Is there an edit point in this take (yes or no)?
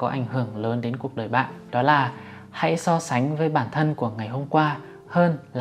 yes